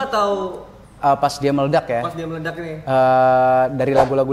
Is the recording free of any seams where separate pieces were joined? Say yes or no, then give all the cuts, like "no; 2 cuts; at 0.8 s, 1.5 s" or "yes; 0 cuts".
yes; 0 cuts